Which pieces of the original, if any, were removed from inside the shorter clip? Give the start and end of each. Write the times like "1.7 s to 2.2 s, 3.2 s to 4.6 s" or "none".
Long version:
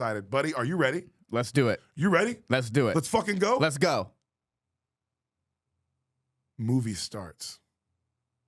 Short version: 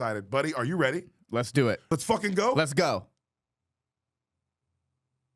1.9 s to 2.9 s